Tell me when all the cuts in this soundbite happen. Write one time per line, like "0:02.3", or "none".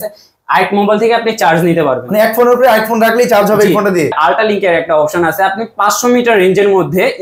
0:04.2